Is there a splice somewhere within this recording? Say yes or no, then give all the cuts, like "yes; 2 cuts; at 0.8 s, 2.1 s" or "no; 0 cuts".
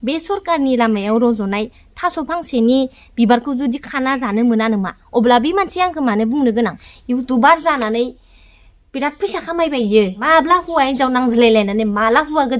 yes; 3 cuts; at 5.0 s, 6.9 s, 10.2 s